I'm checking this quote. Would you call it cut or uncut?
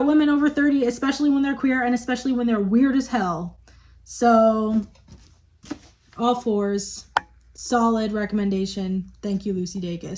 uncut